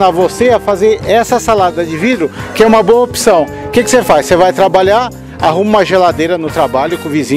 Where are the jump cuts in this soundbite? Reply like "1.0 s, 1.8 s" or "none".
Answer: none